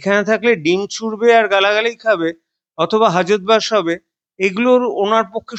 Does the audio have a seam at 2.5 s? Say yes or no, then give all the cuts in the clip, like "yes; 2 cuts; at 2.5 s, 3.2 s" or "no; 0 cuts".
no; 0 cuts